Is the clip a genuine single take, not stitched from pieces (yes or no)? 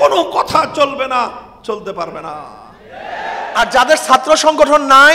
no